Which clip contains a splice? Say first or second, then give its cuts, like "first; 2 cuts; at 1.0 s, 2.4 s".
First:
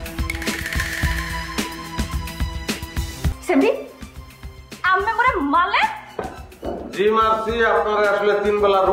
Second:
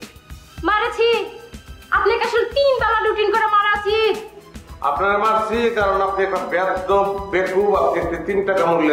first; 1 cut; at 3.4 s